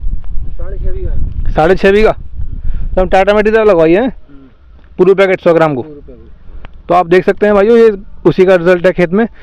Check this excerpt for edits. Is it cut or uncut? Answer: uncut